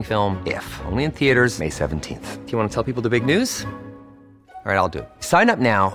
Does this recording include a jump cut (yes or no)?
no